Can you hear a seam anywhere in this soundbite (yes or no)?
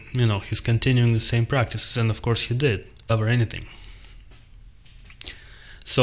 no